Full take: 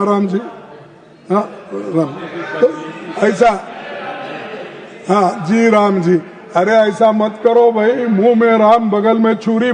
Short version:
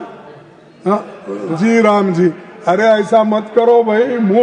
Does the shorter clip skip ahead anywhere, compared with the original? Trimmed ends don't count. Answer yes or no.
yes